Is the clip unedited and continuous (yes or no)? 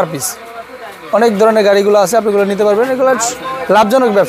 yes